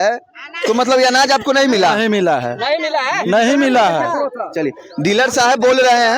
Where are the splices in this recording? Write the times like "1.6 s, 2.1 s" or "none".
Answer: none